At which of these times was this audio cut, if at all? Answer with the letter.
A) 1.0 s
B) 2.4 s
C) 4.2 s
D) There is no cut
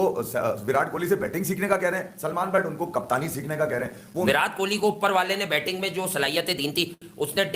C